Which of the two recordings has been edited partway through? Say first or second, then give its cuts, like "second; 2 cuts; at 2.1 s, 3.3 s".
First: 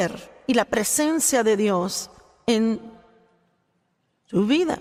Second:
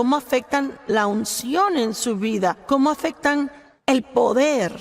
second; 1 cut; at 3.7 s